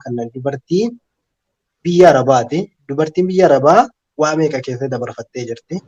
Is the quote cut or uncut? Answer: uncut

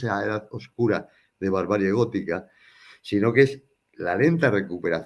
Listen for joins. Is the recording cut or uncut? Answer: uncut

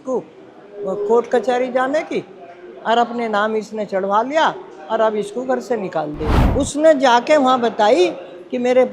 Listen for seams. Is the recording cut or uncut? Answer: cut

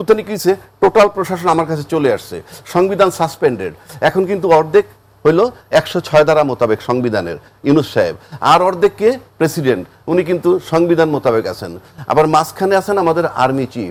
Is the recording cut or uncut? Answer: uncut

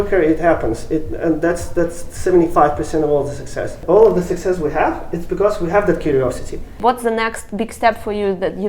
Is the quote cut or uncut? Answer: cut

